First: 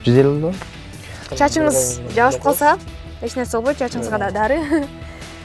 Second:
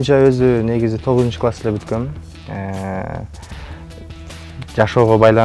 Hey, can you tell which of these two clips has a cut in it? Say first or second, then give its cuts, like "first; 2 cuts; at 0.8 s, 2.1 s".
first; 1 cut; at 1.2 s